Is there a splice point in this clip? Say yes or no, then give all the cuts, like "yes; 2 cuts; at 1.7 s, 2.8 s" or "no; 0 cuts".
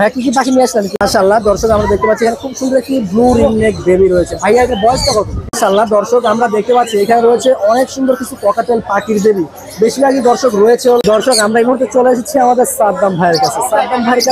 yes; 3 cuts; at 0.9 s, 5.4 s, 11.0 s